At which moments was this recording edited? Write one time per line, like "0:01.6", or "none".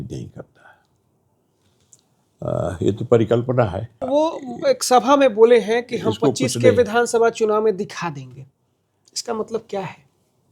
0:04.0